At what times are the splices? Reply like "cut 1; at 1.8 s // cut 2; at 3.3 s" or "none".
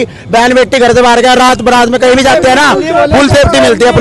none